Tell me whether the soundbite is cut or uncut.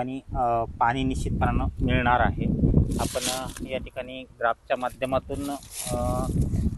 uncut